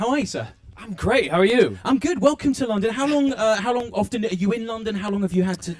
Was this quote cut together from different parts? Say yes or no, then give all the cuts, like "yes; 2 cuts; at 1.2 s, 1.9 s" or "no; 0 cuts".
no; 0 cuts